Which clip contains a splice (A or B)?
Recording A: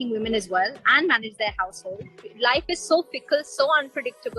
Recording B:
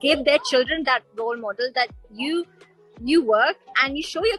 A